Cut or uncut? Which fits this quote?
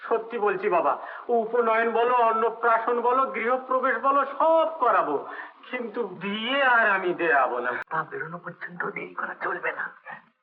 cut